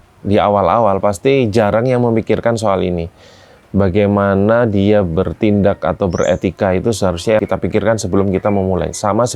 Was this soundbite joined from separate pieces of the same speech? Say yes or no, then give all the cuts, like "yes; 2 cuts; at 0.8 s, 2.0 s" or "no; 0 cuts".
yes; 1 cut; at 7.4 s